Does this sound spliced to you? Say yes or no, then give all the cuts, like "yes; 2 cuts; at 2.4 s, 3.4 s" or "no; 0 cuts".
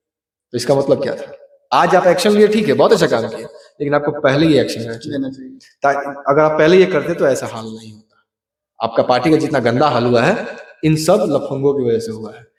no; 0 cuts